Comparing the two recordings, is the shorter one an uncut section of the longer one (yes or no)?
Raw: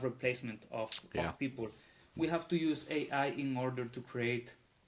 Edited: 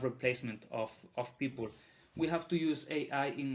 yes